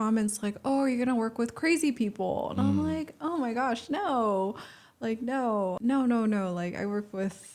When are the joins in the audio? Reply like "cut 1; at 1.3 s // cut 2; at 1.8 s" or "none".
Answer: cut 1; at 5.8 s